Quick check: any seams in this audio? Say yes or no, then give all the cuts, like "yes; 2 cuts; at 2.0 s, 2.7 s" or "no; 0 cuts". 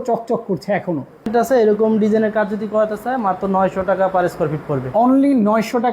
yes; 1 cut; at 1.3 s